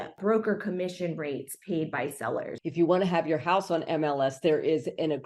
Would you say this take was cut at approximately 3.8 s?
no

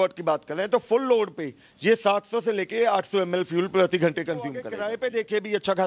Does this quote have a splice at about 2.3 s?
no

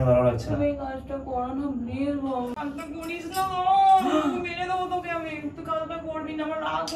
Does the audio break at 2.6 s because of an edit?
yes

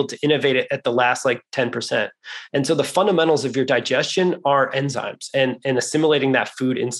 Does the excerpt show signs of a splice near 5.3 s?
no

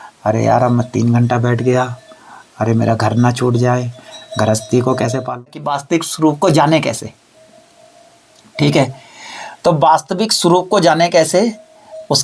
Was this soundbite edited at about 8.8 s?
no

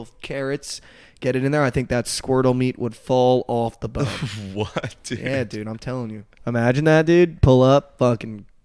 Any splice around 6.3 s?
yes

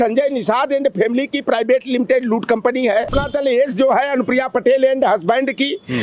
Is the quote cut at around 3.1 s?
yes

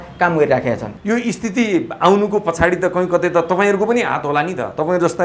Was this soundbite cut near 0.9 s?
yes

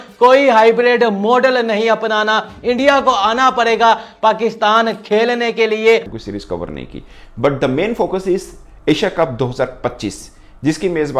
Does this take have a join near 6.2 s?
yes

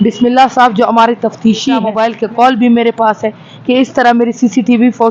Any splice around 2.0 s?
yes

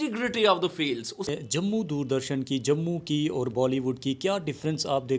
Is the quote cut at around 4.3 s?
no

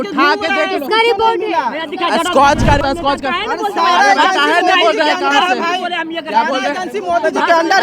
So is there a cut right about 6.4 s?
no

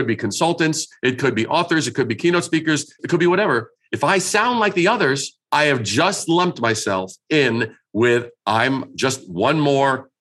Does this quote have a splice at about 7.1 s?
no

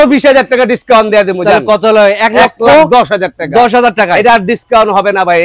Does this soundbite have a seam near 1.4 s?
no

